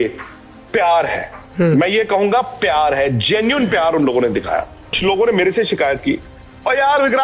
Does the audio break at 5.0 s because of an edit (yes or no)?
yes